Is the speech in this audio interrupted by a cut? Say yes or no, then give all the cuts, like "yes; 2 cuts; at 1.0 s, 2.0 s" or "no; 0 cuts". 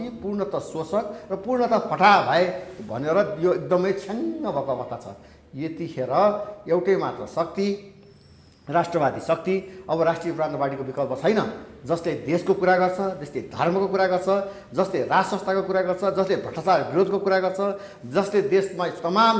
no; 0 cuts